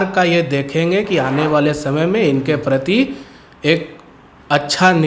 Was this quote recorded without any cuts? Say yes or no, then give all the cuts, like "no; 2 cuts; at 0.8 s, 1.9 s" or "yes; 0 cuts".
yes; 0 cuts